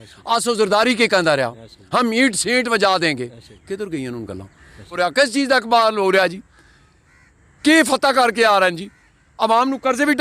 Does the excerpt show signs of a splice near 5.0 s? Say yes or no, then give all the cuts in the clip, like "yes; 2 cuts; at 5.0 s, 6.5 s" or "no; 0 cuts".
yes; 1 cut; at 5.0 s